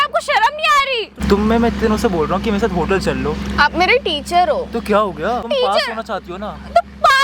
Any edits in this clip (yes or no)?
yes